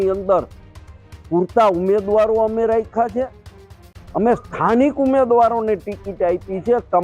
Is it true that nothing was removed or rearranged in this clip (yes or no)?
yes